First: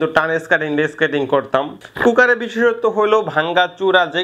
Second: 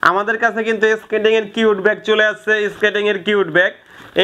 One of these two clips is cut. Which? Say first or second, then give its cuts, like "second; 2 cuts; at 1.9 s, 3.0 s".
first; 1 cut; at 1.8 s